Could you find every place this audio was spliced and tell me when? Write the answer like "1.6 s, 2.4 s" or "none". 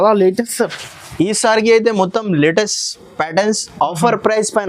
none